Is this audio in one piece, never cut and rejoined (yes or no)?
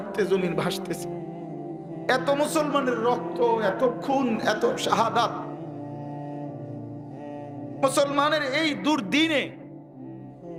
yes